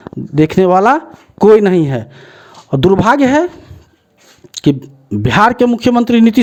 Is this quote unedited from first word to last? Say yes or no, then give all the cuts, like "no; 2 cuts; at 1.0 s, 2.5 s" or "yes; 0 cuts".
yes; 0 cuts